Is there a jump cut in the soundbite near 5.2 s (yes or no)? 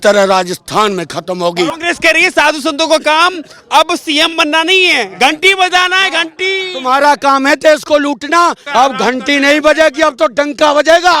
no